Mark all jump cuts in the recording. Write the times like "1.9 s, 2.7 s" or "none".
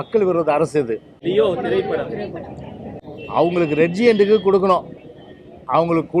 1.1 s, 3.1 s